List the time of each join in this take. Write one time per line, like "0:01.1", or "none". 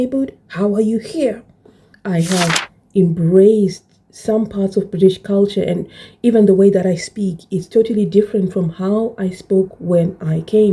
0:01.8